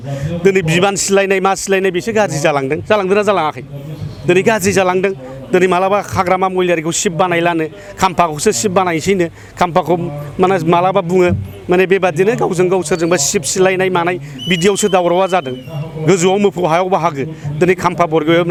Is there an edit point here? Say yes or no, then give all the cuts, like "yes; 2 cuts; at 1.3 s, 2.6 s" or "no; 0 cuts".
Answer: no; 0 cuts